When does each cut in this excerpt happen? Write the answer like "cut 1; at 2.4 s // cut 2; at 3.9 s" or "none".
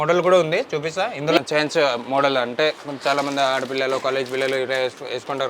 cut 1; at 1.4 s

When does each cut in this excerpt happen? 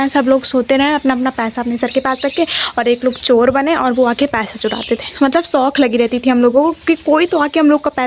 none

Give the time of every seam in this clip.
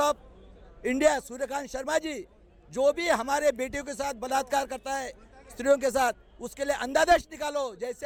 none

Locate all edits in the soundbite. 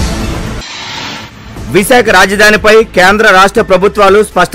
cut 1; at 1.1 s

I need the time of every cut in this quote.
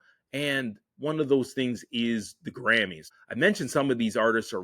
cut 1; at 3.1 s

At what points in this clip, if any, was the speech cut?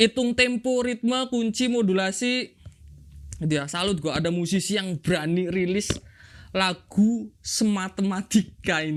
none

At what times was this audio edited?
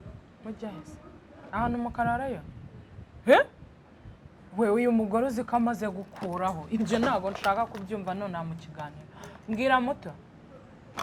none

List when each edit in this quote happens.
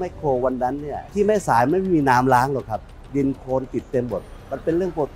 cut 1; at 1.0 s // cut 2; at 2.9 s

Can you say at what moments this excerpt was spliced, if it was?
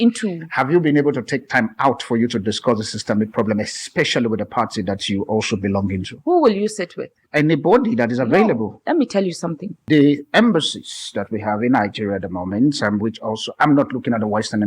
cut 1; at 9.7 s

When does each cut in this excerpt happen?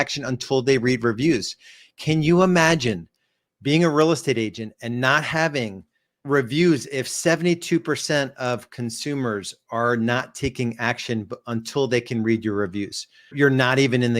cut 1; at 13.3 s

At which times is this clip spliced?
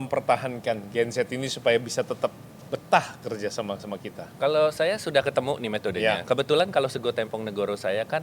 none

